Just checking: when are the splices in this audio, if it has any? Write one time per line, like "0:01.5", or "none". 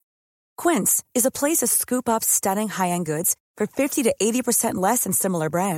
none